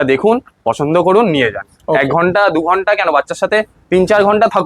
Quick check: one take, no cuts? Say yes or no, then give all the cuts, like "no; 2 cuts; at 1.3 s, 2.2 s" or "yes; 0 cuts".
yes; 0 cuts